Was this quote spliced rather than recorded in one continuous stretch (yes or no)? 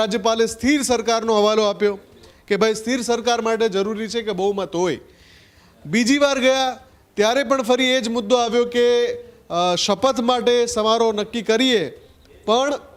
no